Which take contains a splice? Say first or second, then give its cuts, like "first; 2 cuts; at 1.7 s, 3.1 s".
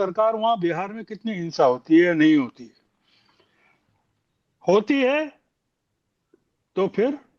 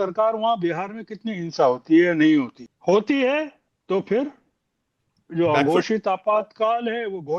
second; 2 cuts; at 2.6 s, 3.7 s